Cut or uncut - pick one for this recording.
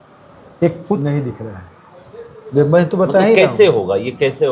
cut